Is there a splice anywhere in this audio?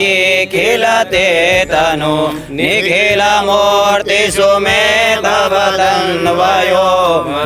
no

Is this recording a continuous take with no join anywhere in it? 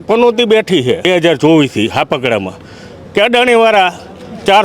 no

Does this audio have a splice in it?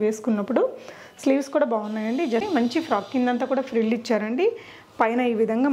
yes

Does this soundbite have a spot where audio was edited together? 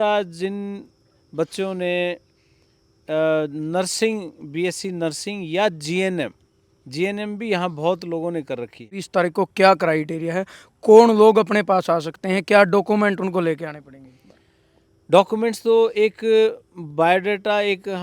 yes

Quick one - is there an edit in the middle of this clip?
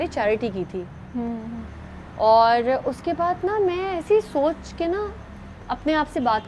no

